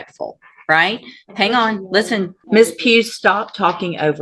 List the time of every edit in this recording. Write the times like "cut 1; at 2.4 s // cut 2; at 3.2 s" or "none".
cut 1; at 2.4 s